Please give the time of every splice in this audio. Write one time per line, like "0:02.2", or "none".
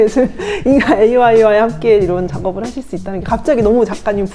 none